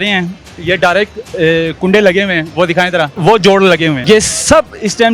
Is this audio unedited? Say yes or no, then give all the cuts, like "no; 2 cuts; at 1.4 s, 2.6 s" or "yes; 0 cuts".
no; 2 cuts; at 3.1 s, 4.0 s